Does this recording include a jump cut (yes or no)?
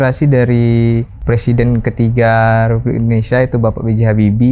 yes